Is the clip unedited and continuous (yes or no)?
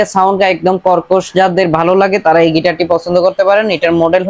yes